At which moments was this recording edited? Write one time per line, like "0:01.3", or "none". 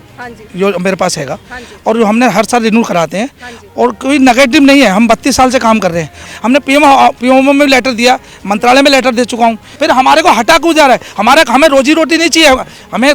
0:06.1
0:09.7